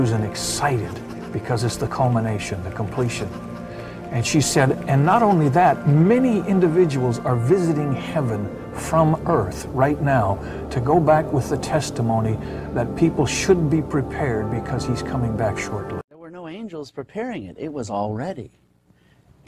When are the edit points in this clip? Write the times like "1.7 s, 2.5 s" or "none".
16.2 s